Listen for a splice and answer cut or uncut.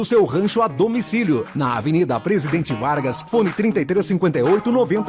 uncut